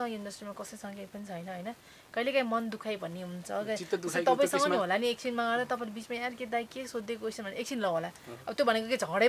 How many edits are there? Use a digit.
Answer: 0